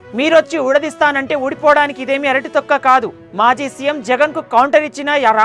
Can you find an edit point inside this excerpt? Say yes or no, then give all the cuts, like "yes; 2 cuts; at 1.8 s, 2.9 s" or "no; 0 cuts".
no; 0 cuts